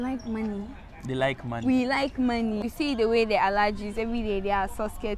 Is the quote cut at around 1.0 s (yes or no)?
no